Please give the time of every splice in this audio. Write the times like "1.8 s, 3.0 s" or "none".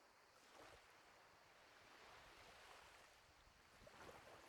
none